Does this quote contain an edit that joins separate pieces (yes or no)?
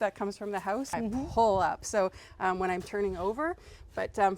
yes